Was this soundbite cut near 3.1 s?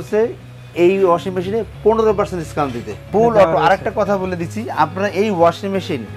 yes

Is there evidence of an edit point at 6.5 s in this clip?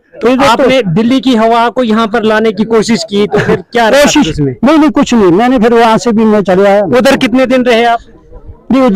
no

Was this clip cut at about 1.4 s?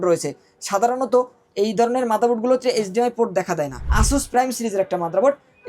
no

